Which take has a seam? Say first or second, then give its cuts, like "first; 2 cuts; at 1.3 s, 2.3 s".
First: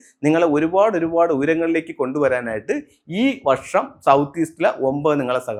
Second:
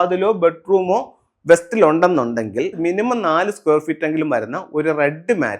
second; 1 cut; at 2.8 s